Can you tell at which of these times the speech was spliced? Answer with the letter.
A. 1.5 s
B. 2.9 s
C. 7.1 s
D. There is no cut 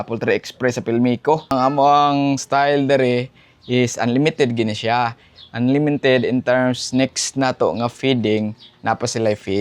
A